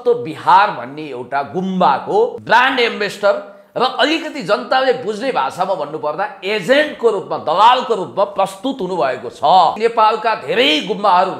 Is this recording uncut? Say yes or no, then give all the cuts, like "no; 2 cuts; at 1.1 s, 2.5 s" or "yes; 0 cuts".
no; 2 cuts; at 2.4 s, 9.8 s